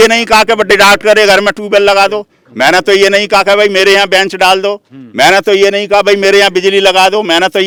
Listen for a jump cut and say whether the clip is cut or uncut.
uncut